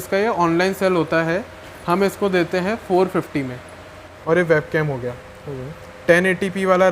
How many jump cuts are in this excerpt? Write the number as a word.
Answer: one